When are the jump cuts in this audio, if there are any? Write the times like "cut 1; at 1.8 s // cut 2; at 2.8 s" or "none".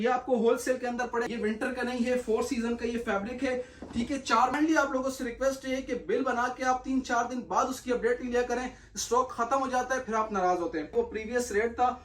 cut 1; at 1.3 s // cut 2; at 4.5 s // cut 3; at 10.9 s